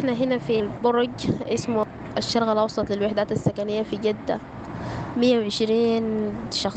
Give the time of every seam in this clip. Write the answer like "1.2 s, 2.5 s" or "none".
none

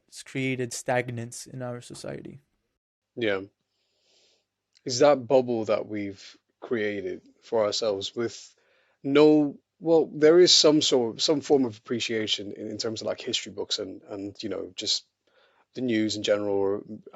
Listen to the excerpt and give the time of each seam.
none

